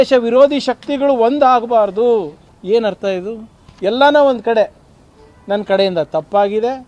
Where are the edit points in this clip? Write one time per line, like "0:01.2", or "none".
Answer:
0:02.4